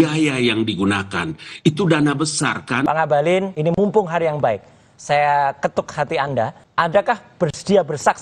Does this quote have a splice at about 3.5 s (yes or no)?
yes